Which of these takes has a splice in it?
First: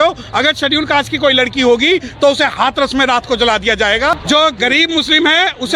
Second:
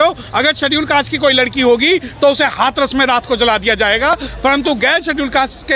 first; 1 cut; at 4.2 s

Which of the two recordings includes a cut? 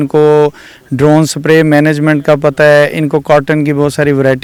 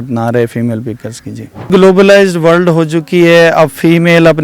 second; 1 cut; at 1.7 s

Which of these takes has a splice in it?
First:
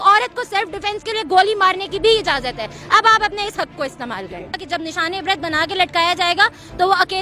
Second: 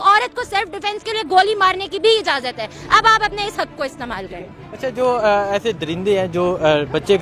first; 1 cut; at 4.6 s

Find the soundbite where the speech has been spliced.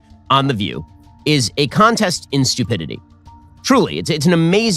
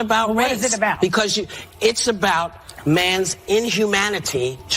first; 1 cut; at 3.3 s

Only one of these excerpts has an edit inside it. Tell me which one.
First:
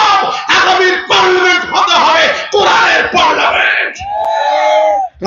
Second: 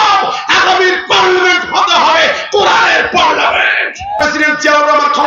second; 1 cut; at 4.2 s

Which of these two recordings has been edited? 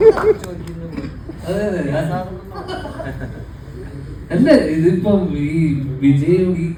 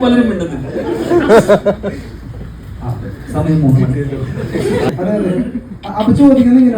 second; 1 cut; at 4.9 s

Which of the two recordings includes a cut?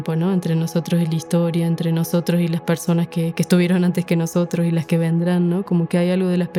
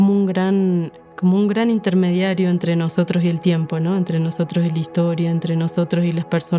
second; 1 cut; at 0.9 s

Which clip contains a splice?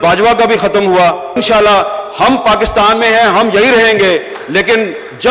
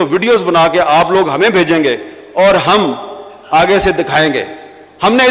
first; 1 cut; at 1.3 s

